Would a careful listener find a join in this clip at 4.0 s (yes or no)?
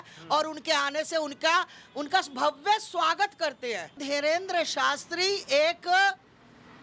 yes